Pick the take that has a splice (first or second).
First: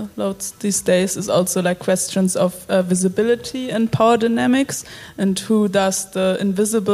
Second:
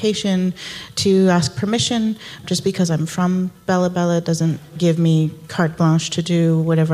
second